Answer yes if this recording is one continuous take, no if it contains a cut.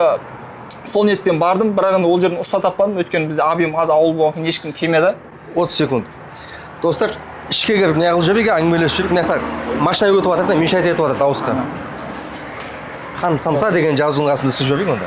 yes